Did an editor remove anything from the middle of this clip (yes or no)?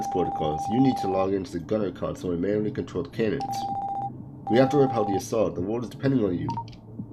no